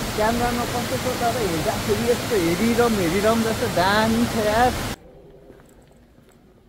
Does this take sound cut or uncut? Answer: cut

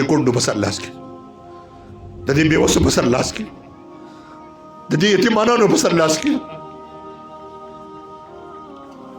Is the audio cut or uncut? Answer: cut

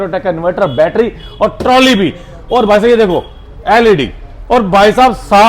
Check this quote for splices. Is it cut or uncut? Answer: uncut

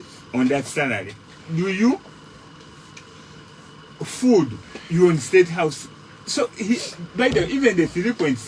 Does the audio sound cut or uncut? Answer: uncut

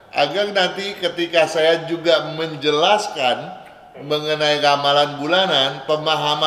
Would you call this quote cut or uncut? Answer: uncut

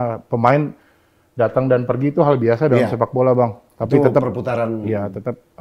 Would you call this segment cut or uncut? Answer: uncut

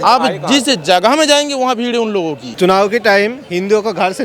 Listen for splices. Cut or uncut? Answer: cut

